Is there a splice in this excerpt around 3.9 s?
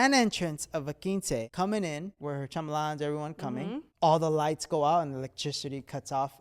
yes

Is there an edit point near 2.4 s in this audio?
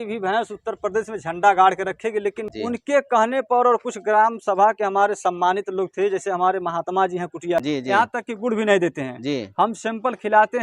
yes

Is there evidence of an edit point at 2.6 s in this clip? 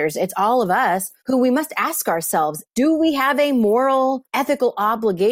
yes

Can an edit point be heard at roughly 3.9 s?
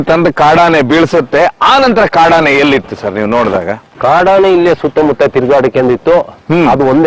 no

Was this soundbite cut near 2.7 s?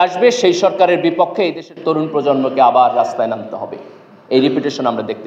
no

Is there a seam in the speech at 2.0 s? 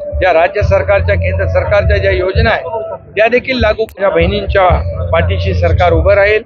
no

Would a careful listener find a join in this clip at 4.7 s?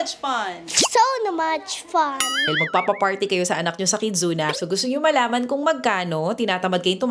no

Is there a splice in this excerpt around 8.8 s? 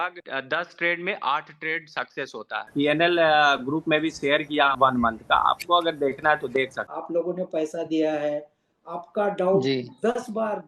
no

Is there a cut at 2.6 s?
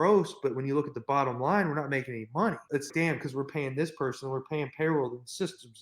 yes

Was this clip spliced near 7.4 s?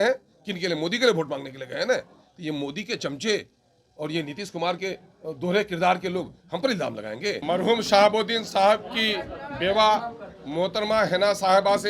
yes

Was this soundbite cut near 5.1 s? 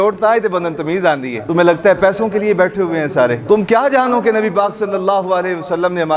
no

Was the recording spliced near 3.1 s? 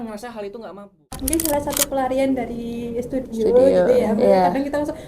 no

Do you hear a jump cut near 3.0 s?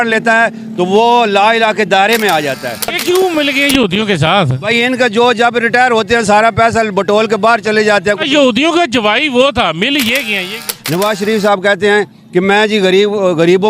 yes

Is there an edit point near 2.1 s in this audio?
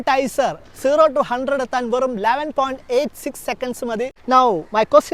no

